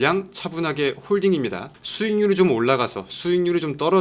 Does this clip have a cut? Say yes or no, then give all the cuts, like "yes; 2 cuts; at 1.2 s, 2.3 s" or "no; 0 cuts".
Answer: yes; 1 cut; at 1.8 s